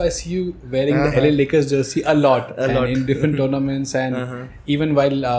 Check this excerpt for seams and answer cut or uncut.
uncut